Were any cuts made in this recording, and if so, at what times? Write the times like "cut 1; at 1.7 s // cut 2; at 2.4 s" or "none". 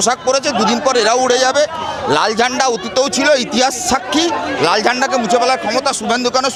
none